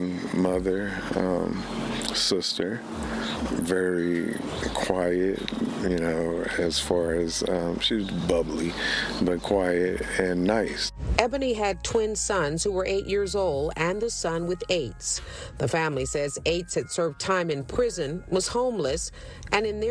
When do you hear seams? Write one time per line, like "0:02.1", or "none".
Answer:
none